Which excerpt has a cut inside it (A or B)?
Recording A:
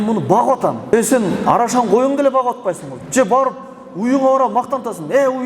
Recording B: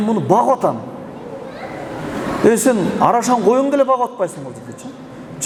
A